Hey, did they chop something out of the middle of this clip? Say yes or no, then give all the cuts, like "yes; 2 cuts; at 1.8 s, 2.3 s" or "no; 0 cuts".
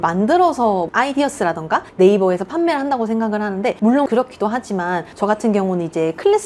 no; 0 cuts